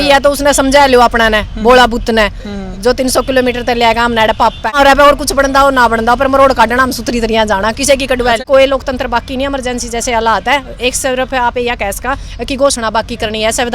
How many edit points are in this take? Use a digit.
2